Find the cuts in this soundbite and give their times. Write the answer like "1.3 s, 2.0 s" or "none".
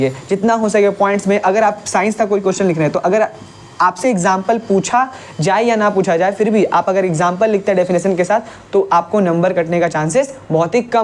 none